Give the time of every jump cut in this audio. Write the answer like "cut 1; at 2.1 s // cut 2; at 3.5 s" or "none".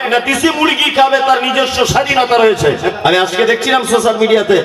cut 1; at 2.9 s